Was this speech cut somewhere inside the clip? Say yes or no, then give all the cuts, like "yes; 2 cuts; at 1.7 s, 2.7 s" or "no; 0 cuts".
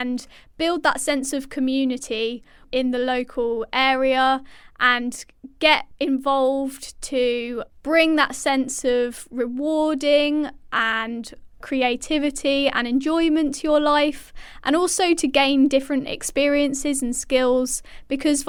no; 0 cuts